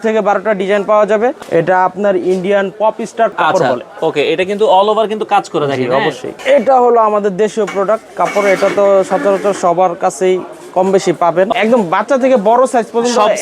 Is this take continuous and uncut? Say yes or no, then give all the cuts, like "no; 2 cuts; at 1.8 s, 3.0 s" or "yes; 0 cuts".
no; 4 cuts; at 1.4 s, 3.3 s, 6.3 s, 11.5 s